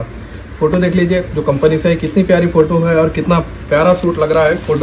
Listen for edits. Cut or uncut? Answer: uncut